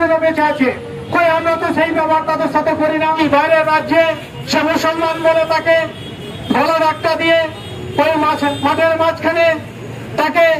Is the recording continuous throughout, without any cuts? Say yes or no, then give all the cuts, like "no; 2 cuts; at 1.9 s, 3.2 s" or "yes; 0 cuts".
no; 1 cut; at 3.2 s